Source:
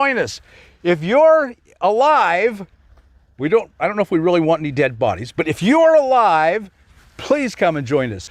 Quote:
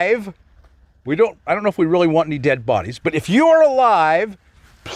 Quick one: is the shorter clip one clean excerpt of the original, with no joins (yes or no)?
yes